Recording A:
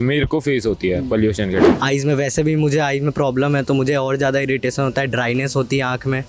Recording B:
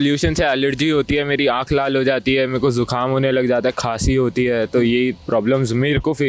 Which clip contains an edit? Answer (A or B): A